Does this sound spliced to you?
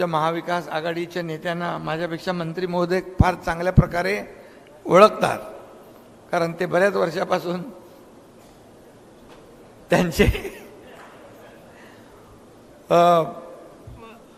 no; 0 cuts

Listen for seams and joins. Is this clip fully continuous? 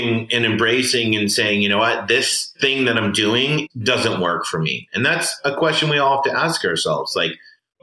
no; 2 cuts; at 2.5 s, 3.7 s

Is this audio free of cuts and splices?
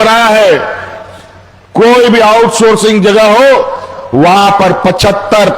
yes; 0 cuts

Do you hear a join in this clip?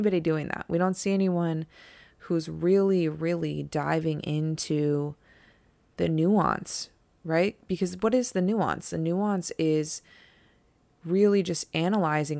no; 0 cuts

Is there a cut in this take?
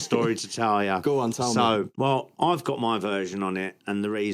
yes; 1 cut; at 1.9 s

